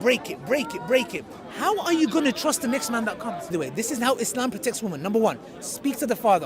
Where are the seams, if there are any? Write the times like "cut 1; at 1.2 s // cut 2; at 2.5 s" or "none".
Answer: cut 1; at 3.5 s